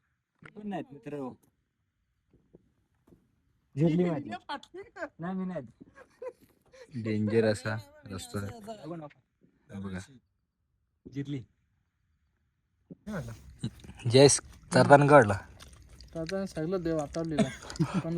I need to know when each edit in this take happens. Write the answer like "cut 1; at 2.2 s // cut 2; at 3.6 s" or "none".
cut 1; at 13.1 s